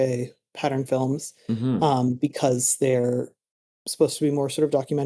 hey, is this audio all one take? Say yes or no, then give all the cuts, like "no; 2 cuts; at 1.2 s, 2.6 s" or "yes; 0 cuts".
yes; 0 cuts